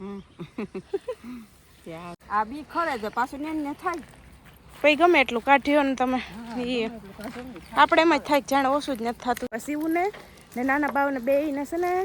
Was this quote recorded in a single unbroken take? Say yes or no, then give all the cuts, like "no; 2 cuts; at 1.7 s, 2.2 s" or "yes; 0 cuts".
no; 2 cuts; at 2.1 s, 9.5 s